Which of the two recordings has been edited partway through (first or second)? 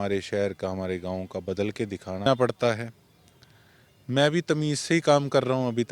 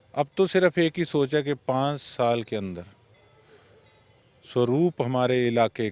first